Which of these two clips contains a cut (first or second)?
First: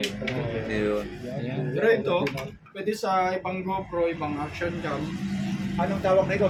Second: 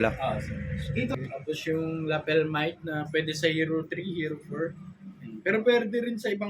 second